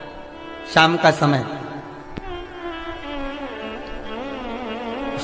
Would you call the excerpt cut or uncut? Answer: uncut